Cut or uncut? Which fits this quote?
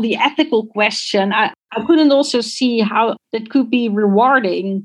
cut